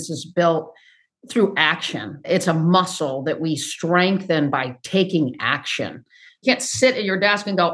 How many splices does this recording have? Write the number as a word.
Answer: one